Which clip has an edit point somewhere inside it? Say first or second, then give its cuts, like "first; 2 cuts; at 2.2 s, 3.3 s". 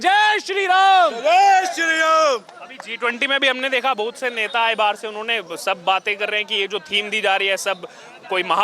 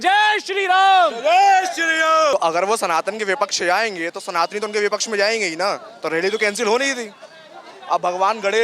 second; 1 cut; at 2.3 s